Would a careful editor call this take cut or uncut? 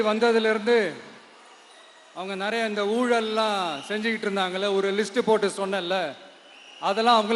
uncut